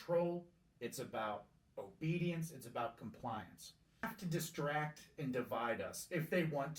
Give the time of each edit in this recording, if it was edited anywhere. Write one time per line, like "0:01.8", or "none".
0:04.1